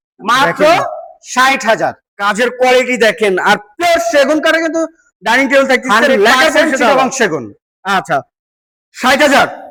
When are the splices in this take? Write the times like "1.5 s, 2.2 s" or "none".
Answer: none

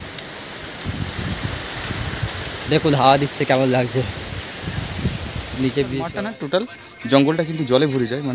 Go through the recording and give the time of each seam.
6.1 s

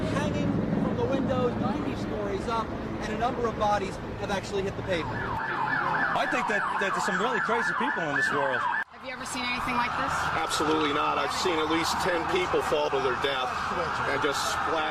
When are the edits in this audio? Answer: 9.0 s

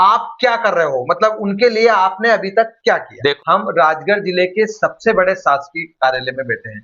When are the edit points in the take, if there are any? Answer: 3.4 s

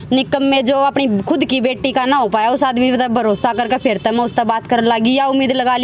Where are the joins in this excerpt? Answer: none

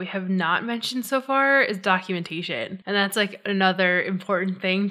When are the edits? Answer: 2.7 s

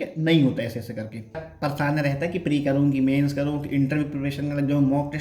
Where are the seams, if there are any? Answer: 1.5 s

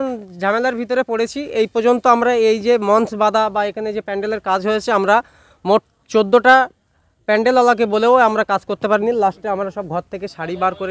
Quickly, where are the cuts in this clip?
none

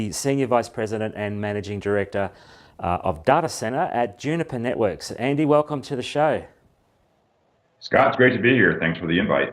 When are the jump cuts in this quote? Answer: 2.5 s

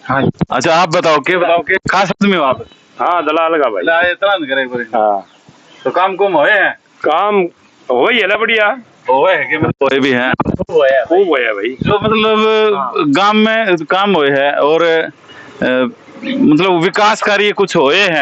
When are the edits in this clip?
none

